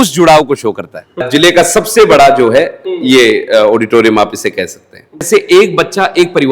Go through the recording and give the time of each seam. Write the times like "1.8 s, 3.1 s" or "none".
1.2 s, 5.3 s